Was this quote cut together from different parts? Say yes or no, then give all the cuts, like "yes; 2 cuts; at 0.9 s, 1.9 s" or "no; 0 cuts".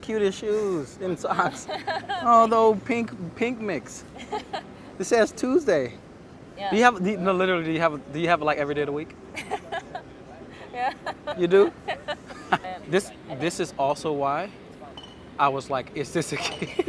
yes; 2 cuts; at 4.8 s, 12.6 s